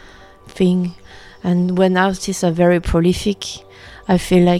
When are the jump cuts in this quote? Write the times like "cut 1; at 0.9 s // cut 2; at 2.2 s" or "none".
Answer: none